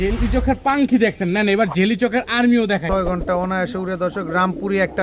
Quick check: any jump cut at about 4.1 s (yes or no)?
no